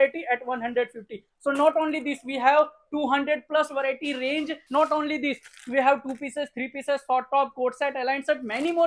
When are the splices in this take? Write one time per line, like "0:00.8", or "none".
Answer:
0:04.6

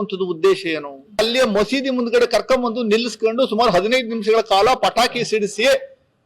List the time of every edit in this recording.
0:01.2

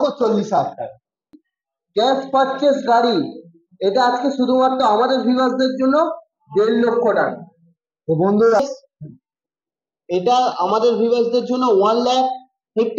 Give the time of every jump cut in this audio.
0:01.4
0:08.6

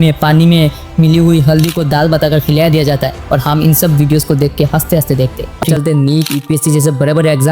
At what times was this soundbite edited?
0:05.6

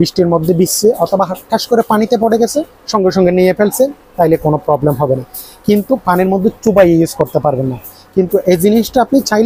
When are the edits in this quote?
none

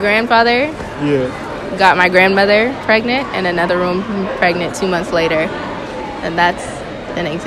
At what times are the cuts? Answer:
0:05.7

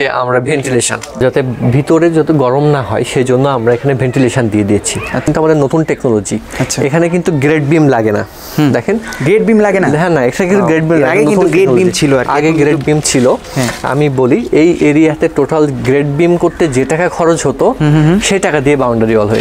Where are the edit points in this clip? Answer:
0:01.2
0:05.2

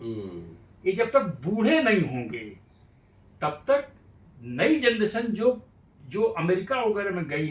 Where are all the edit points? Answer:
none

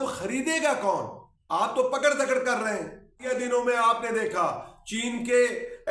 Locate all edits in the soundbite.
0:03.2

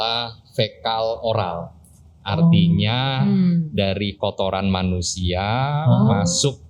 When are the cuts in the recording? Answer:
none

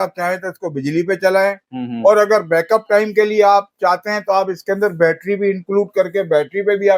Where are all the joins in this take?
none

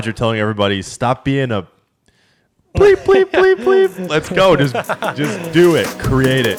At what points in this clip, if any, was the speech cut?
none

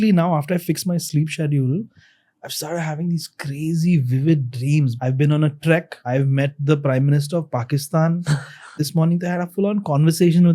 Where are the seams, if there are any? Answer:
0:04.9
0:06.0
0:08.8

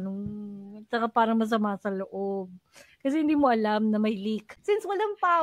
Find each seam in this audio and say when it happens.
0:04.5

